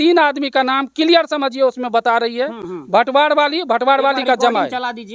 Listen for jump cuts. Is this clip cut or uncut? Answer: uncut